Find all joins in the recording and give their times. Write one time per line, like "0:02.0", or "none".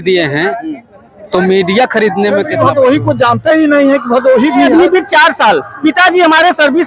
0:02.5
0:04.7